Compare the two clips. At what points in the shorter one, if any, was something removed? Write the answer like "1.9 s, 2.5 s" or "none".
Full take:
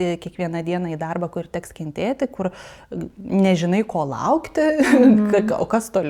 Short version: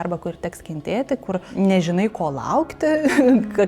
1.5 s